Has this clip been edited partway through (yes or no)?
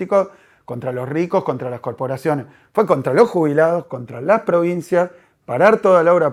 no